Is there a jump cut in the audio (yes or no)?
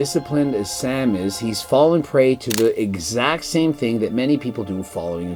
no